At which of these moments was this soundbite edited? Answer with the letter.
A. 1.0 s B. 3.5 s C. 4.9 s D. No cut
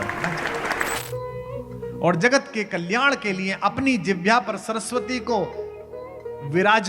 A